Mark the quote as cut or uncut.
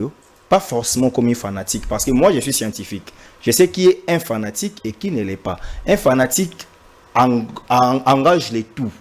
uncut